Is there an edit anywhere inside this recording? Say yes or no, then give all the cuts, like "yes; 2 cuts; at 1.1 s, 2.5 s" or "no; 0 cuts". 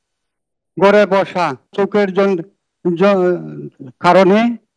yes; 1 cut; at 1.7 s